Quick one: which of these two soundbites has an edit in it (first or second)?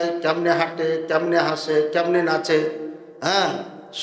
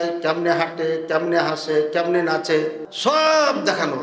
second